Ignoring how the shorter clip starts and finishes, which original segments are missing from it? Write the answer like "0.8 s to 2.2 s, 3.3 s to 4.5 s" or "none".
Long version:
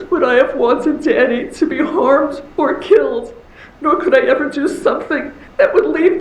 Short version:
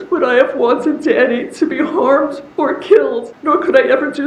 3.3 s to 3.7 s